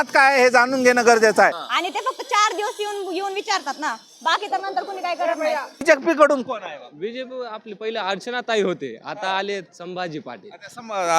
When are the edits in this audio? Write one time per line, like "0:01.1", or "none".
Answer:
0:01.6
0:05.8